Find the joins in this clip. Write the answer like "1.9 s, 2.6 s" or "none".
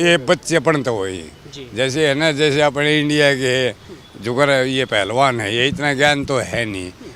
none